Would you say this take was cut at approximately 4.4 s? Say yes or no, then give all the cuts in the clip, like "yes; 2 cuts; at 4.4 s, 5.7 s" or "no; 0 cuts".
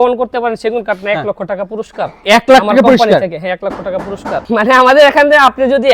yes; 1 cut; at 4.4 s